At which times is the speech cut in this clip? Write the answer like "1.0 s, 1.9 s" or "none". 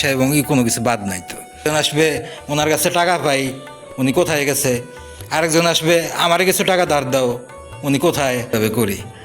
1.7 s, 8.5 s